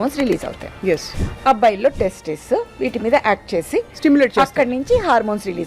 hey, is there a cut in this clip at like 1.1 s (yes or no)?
yes